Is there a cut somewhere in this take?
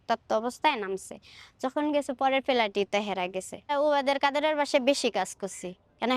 yes; 1 cut; at 3.7 s

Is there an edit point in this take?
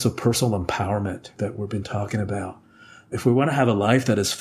no; 0 cuts

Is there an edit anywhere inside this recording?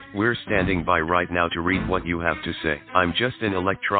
no; 0 cuts

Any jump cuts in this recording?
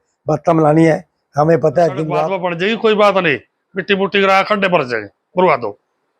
yes; 1 cut; at 2.3 s

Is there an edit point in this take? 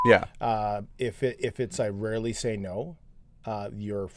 no; 0 cuts

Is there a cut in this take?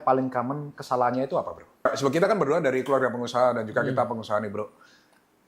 yes; 1 cut; at 1.8 s

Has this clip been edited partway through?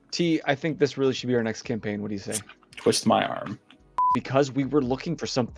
yes; 1 cut; at 4.1 s

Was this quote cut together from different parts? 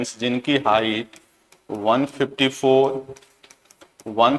no; 0 cuts

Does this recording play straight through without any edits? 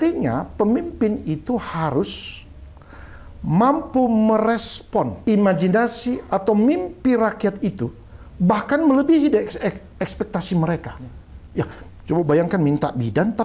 no; 1 cut; at 5.2 s

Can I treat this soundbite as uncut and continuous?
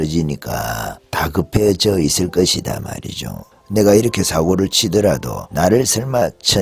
no; 2 cuts; at 1.0 s, 5.4 s

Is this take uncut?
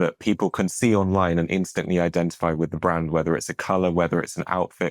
yes; 0 cuts

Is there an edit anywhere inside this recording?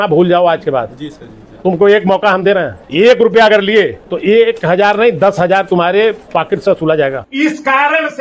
yes; 4 cuts; at 2.8 s, 4.0 s, 6.2 s, 7.2 s

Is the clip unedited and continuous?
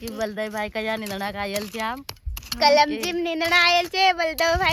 yes; 0 cuts

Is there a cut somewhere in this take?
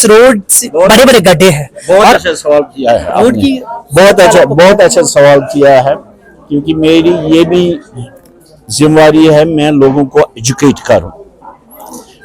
no; 0 cuts

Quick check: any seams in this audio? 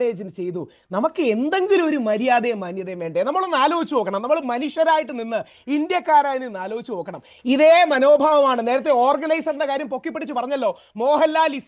yes; 1 cut; at 7.3 s

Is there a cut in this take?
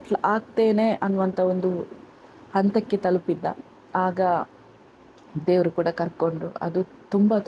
no; 0 cuts

